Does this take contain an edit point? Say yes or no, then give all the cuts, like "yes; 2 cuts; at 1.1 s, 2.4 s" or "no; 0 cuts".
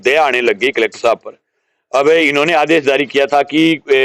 no; 0 cuts